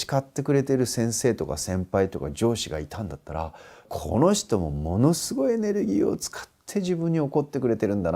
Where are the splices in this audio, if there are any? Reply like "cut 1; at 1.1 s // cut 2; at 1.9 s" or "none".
cut 1; at 0.9 s // cut 2; at 3.8 s